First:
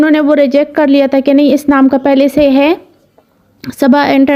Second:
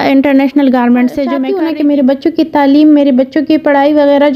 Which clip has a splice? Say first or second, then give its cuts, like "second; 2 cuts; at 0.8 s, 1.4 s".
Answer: second; 1 cut; at 1.4 s